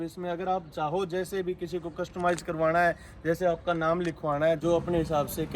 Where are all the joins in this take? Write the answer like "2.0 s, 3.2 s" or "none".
4.6 s